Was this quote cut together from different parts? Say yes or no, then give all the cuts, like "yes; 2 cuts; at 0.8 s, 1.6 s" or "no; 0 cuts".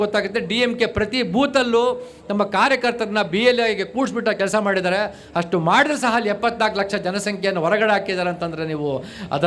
no; 0 cuts